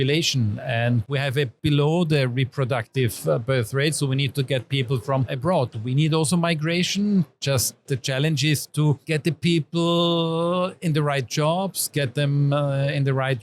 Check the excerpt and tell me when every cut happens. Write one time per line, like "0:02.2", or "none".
0:01.2
0:05.7